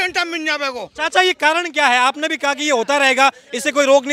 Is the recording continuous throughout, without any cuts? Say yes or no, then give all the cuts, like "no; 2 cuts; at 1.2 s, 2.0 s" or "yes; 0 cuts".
yes; 0 cuts